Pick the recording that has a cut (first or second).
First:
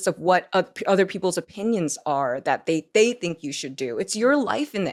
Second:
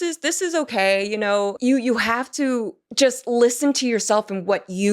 second